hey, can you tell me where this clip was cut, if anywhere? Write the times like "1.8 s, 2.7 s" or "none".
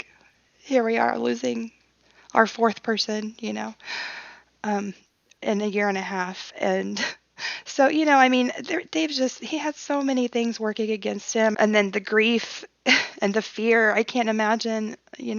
11.5 s